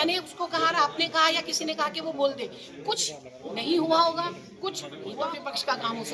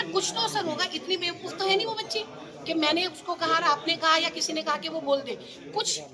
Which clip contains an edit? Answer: first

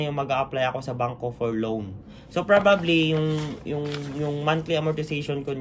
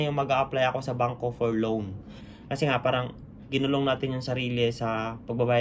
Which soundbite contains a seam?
second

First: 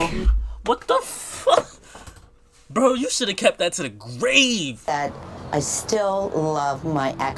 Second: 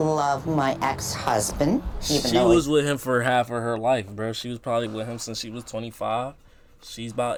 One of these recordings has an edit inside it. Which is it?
first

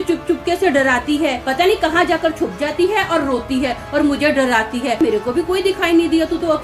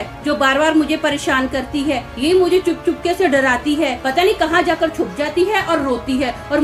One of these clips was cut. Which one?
first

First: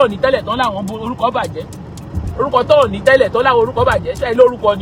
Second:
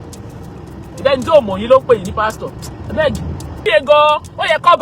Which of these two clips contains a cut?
second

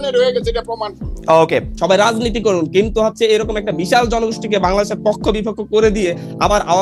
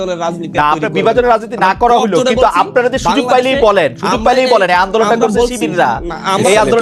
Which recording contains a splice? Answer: first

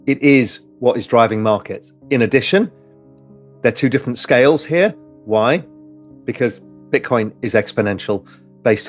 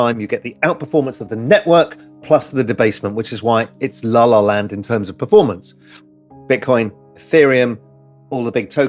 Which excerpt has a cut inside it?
first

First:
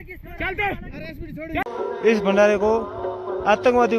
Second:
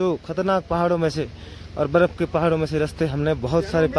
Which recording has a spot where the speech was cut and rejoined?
first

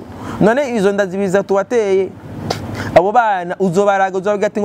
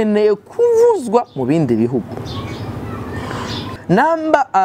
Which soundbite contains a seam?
second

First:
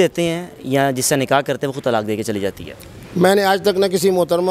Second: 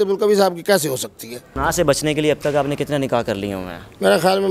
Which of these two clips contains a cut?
second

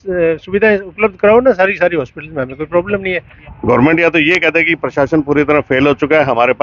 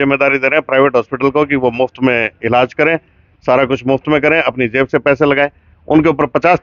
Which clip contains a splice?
first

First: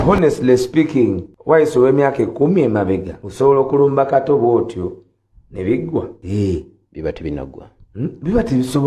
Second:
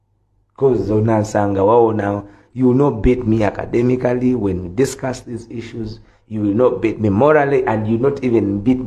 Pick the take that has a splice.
first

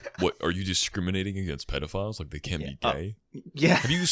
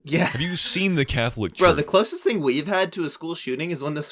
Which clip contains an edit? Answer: second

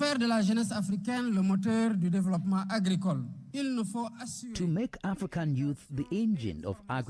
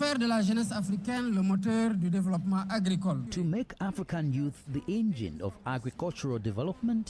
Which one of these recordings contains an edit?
second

